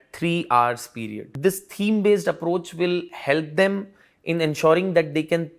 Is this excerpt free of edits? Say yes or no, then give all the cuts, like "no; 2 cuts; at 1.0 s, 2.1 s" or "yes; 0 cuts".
no; 1 cut; at 1.3 s